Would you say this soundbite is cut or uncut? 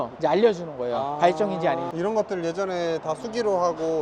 cut